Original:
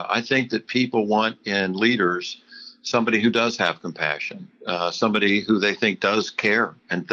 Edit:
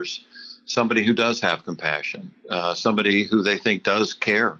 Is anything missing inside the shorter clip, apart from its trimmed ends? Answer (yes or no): no